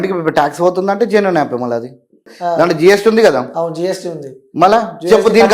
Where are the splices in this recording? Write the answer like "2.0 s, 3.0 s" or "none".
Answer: 2.3 s